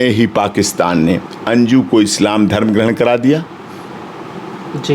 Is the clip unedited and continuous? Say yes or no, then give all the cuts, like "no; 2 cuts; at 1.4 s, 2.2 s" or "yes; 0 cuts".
yes; 0 cuts